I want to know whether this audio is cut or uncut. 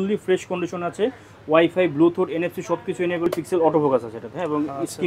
cut